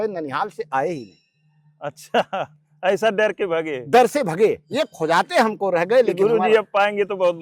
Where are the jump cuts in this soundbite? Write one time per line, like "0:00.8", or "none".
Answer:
none

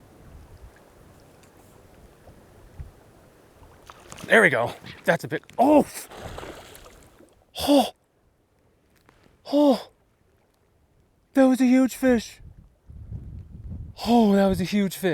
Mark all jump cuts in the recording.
0:13.9

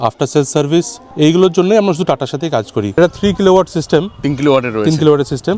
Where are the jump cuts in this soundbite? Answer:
0:01.0
0:02.9

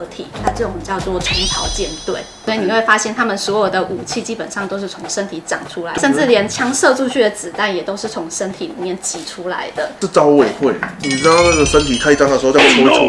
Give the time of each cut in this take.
0:02.4
0:05.9
0:09.9

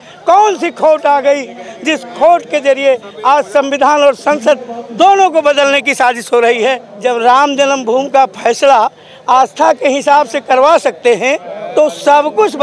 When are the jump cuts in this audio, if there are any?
0:06.9
0:11.5

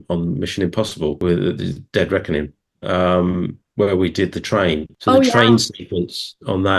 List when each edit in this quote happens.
0:01.2
0:04.9

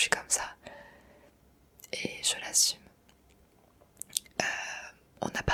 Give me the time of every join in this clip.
none

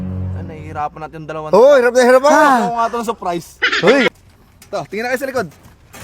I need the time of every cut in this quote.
0:04.1

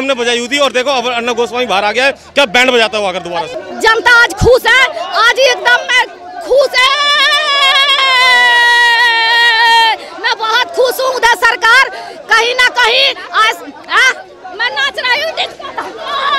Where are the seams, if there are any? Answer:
0:03.6

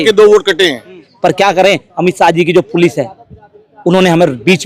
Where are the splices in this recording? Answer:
0:01.0

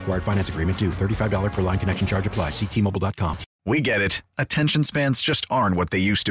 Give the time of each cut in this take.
0:03.5

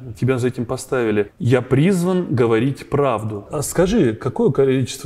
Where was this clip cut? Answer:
0:01.4
0:03.6

